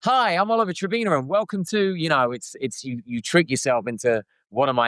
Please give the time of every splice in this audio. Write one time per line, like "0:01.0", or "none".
none